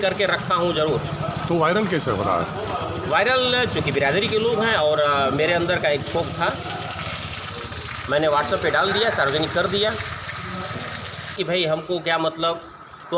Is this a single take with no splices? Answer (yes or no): no